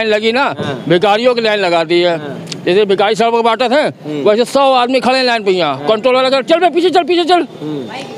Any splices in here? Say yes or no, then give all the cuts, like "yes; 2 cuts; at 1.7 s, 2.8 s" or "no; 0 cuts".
no; 0 cuts